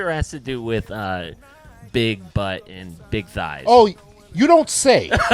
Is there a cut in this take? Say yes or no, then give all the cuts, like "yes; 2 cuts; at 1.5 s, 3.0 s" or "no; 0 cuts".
no; 0 cuts